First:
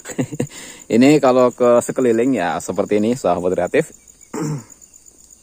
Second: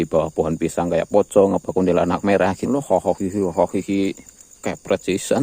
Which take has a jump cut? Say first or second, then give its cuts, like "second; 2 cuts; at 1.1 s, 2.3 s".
second; 1 cut; at 2.6 s